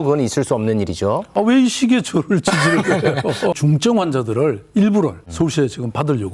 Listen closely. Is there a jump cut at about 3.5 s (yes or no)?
yes